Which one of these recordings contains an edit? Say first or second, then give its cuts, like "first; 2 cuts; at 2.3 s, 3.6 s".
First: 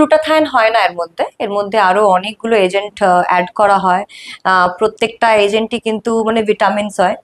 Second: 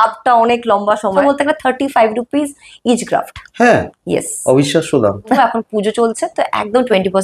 second; 2 cuts; at 1.2 s, 5.4 s